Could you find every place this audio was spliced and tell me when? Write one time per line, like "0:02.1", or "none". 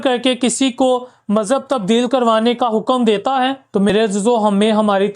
0:03.9